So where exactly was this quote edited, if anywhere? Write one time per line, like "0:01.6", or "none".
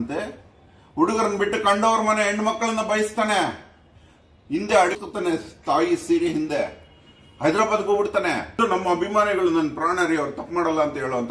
0:05.0
0:08.6